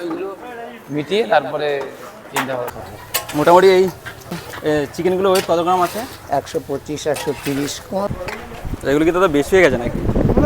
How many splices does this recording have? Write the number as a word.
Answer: three